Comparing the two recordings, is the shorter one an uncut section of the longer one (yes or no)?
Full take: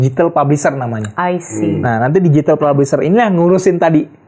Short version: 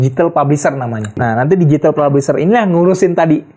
no